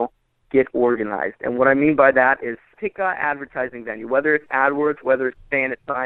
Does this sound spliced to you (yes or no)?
yes